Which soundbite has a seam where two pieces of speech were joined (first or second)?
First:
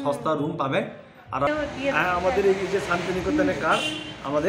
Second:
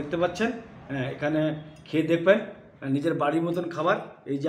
first